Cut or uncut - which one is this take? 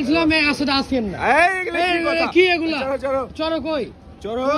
uncut